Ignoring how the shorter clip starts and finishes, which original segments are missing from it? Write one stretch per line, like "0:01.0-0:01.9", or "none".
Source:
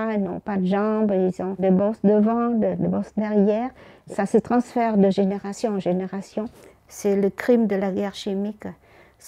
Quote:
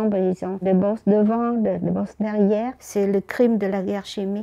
0:03.8-0:06.9